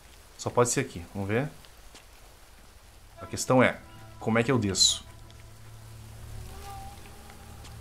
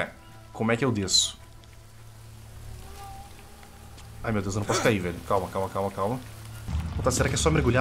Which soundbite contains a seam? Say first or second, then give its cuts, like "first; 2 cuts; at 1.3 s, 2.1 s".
second; 1 cut; at 6.7 s